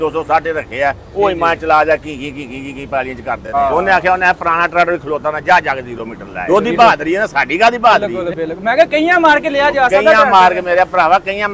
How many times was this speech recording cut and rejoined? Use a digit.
3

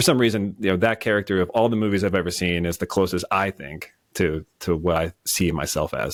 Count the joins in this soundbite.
0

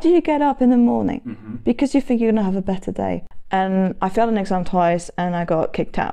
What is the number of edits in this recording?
1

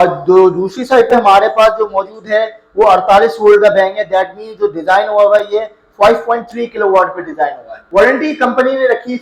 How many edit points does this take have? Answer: 1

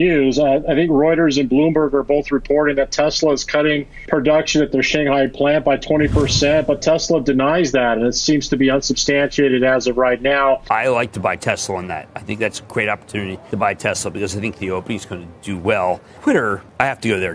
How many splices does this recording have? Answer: 4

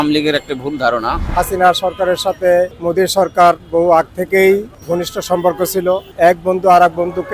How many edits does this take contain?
4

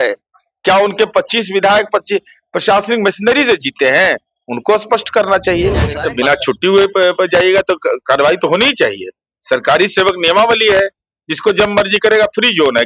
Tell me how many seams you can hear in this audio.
1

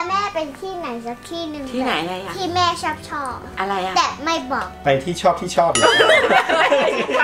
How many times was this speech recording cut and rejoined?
0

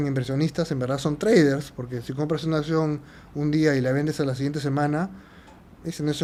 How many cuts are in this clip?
0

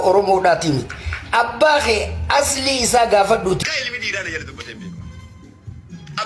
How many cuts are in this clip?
1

